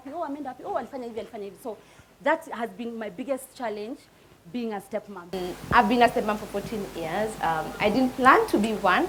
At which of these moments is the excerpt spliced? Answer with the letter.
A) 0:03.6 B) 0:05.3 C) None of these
B